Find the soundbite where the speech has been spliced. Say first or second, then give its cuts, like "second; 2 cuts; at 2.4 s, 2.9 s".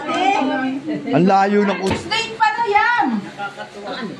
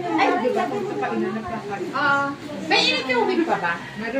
first; 1 cut; at 1.9 s